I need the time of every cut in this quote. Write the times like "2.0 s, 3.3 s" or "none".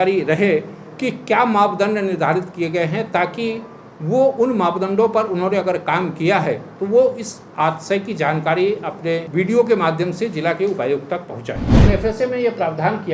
9.3 s, 11.8 s